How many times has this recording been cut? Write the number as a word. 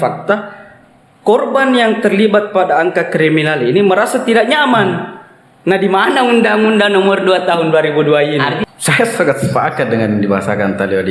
one